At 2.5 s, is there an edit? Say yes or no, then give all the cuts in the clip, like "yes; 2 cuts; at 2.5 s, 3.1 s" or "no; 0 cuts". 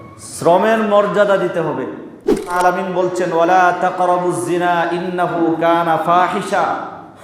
yes; 1 cut; at 2.5 s